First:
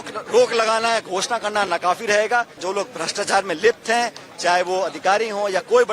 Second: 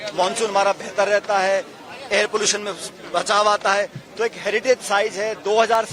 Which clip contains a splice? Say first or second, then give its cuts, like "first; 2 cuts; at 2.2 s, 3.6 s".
first; 1 cut; at 2.6 s